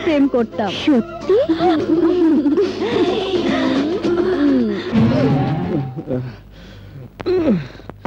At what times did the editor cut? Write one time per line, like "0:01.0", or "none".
0:01.8